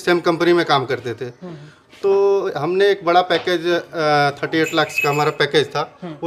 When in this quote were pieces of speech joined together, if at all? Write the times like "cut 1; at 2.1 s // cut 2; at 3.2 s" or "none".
none